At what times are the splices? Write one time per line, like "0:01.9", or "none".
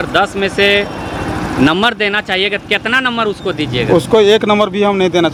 none

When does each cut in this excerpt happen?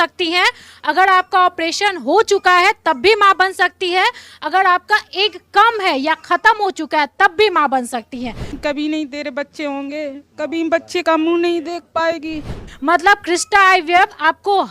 0:08.6
0:12.6

